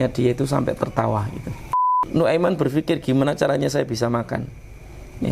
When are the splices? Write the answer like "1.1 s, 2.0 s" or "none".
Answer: 1.8 s